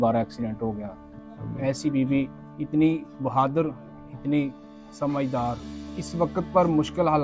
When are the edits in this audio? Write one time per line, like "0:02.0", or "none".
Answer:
0:01.0
0:02.4